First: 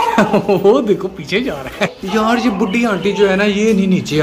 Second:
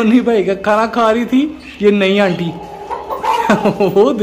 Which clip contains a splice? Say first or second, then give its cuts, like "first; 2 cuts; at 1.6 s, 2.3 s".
first; 1 cut; at 2.0 s